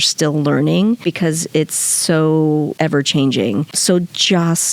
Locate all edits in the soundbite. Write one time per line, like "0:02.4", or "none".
0:01.0
0:02.7
0:03.7